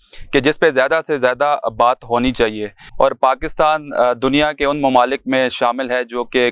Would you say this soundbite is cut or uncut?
uncut